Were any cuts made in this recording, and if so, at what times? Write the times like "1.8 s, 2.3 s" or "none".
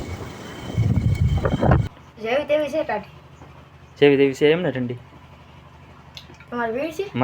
1.8 s